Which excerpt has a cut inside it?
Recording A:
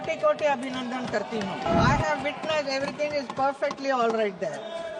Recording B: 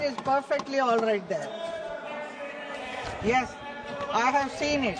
A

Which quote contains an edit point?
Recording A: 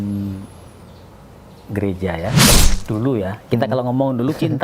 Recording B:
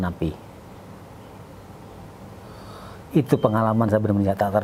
A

